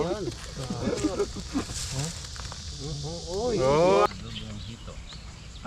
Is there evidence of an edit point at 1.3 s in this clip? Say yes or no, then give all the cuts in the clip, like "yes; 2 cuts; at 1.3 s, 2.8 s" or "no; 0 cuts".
no; 1 cut; at 4.1 s